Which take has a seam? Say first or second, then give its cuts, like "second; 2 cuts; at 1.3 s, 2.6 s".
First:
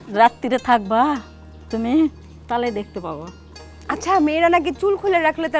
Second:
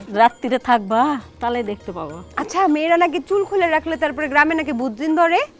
second; 2 cuts; at 1.3 s, 2.2 s